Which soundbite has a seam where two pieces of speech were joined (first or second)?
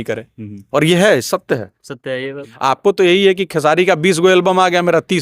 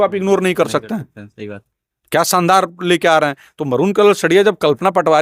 first